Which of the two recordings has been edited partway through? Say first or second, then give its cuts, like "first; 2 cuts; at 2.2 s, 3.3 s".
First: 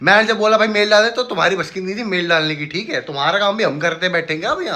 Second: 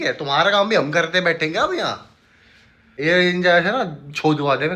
second; 1 cut; at 2.8 s